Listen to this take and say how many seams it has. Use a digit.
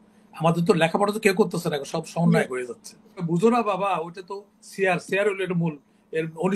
1